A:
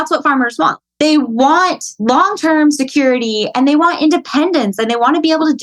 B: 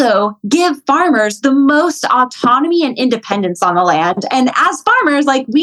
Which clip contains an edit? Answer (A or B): A